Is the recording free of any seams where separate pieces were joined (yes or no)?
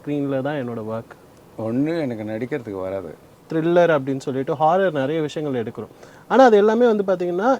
no